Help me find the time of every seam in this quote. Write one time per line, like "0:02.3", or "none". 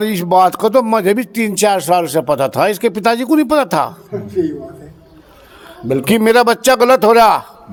none